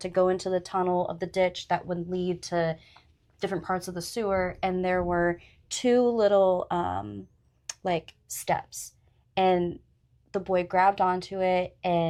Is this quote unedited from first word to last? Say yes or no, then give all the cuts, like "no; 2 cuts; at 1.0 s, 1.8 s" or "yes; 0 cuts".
yes; 0 cuts